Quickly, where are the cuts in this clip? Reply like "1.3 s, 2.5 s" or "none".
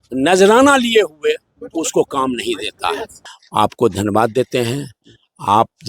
3.2 s